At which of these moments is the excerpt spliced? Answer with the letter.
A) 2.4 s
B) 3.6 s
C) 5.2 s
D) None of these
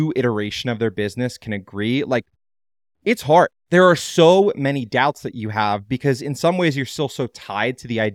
D